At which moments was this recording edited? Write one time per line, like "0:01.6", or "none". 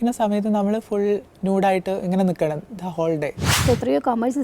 0:03.5

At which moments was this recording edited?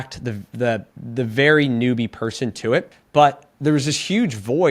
0:01.0
0:03.0

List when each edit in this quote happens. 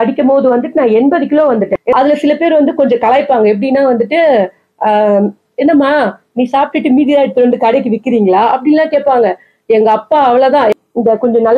0:01.9
0:10.7

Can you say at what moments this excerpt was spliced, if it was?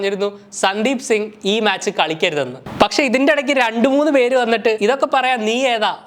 0:02.6

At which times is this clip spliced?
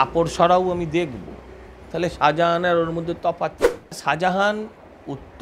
0:04.0

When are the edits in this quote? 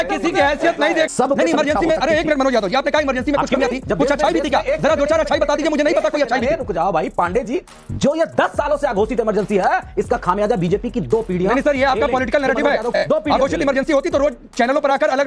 0:01.1
0:03.9
0:07.8
0:13.0

